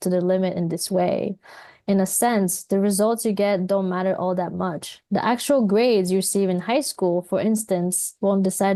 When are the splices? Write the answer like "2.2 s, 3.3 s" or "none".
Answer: none